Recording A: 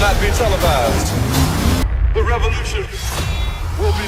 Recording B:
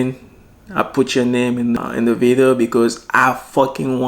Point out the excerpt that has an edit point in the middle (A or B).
B